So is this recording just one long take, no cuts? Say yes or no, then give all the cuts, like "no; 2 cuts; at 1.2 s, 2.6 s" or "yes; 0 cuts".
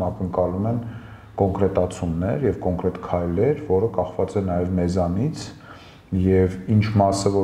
yes; 0 cuts